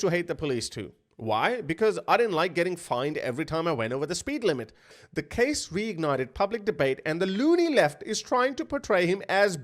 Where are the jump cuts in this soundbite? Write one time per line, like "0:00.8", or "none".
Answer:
0:04.8